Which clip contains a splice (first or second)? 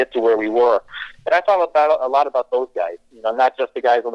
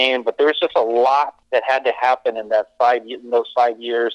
second